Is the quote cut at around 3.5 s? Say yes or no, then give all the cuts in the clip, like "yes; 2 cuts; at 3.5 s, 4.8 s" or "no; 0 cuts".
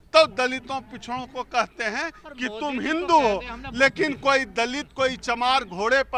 no; 0 cuts